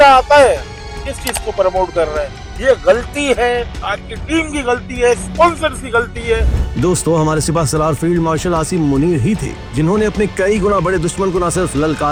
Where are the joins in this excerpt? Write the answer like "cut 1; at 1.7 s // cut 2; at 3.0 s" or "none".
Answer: none